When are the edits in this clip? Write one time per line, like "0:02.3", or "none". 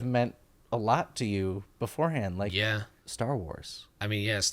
0:03.0